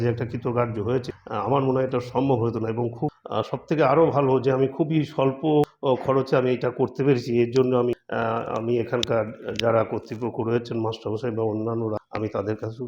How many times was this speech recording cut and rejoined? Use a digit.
5